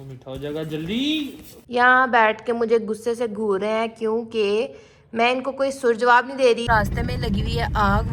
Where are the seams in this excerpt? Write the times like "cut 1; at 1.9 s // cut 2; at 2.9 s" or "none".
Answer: cut 1; at 1.5 s // cut 2; at 6.6 s